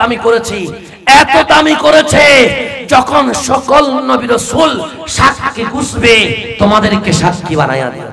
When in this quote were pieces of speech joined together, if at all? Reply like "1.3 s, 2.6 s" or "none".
none